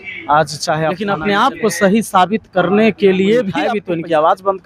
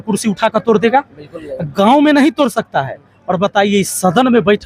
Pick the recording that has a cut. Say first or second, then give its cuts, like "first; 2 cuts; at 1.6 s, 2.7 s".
first; 2 cuts; at 1.1 s, 3.7 s